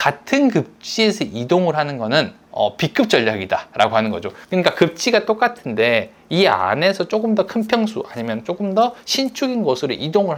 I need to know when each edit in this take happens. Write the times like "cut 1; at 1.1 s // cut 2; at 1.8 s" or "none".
none